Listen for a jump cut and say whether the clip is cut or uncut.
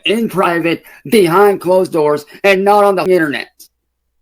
cut